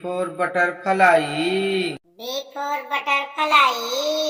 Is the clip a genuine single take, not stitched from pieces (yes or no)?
yes